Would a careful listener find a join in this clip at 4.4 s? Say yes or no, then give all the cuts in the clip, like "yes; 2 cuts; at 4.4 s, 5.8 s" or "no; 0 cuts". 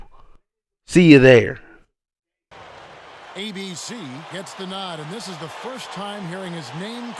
no; 1 cut; at 2.5 s